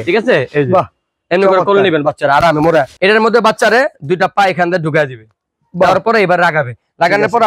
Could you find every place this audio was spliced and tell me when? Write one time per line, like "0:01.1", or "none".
0:02.9